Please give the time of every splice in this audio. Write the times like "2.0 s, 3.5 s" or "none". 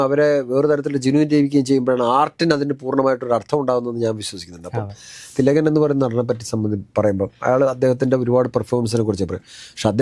5.3 s